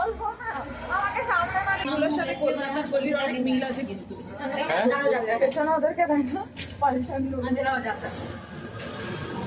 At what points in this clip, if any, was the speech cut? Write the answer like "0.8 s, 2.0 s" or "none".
1.9 s